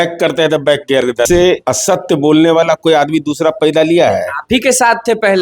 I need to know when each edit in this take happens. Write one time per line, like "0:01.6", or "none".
0:01.4